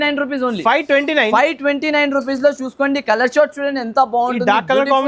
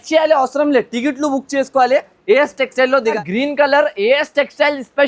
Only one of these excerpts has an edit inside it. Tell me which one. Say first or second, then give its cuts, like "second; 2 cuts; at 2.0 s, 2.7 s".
second; 1 cut; at 3.1 s